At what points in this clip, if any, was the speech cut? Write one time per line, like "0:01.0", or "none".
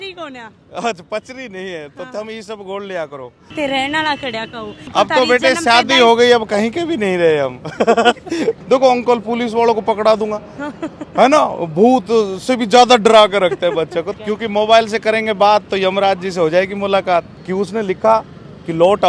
0:03.5
0:08.6
0:14.1
0:17.3